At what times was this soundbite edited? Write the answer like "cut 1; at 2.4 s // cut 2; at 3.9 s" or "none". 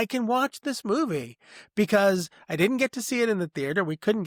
none